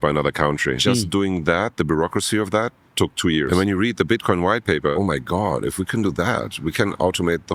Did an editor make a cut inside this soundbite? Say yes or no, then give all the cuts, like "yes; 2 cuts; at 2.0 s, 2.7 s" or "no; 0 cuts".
yes; 3 cuts; at 0.8 s, 3.5 s, 4.9 s